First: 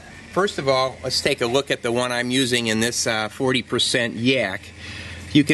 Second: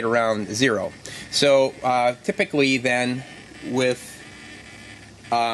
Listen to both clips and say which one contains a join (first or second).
second